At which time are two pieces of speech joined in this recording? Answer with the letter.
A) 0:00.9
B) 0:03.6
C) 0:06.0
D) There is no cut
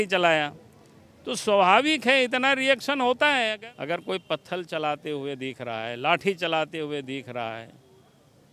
B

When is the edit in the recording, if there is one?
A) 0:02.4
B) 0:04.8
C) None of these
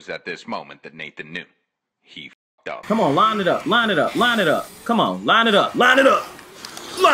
A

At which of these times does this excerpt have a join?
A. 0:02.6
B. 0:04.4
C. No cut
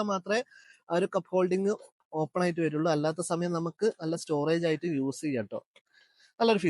C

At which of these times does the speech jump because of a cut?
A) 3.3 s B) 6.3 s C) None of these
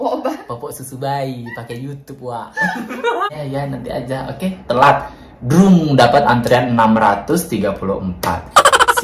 A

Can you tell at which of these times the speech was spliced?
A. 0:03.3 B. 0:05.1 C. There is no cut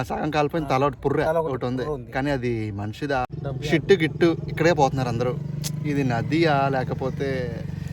A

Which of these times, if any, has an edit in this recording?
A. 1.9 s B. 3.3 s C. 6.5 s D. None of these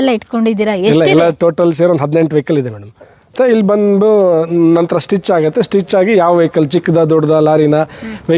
B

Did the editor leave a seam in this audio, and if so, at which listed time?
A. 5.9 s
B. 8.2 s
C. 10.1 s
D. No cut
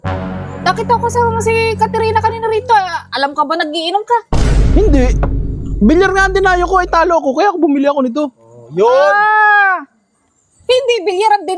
D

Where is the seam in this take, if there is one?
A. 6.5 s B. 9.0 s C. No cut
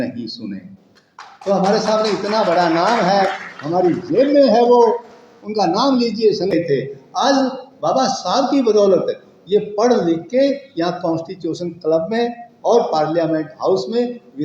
A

